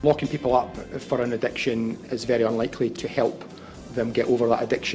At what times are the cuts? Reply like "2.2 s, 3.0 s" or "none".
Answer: 2.0 s, 3.0 s